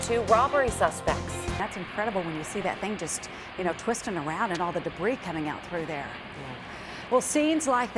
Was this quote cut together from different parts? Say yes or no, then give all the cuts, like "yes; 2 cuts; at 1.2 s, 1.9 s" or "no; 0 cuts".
yes; 1 cut; at 1.6 s